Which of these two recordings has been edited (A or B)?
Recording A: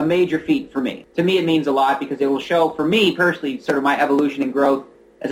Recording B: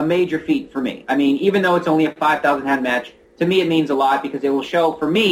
A